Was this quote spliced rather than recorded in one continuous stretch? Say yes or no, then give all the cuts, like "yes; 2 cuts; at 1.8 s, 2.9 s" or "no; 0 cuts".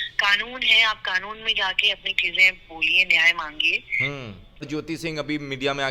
yes; 1 cut; at 4.7 s